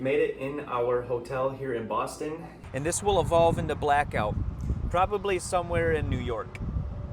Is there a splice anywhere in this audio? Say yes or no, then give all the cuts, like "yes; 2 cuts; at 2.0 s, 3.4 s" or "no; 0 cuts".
yes; 1 cut; at 2.6 s